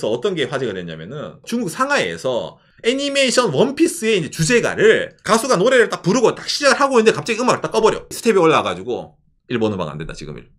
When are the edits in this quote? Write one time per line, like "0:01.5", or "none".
0:05.1
0:08.1